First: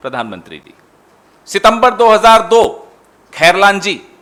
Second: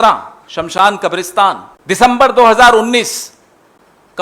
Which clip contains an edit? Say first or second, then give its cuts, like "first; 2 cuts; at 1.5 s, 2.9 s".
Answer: second; 1 cut; at 1.7 s